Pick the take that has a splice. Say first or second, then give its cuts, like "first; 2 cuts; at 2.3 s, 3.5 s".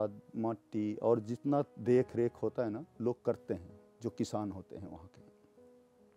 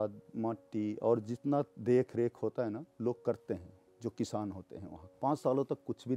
second; 1 cut; at 5.0 s